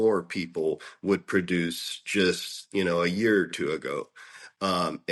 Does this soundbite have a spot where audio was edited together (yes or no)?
no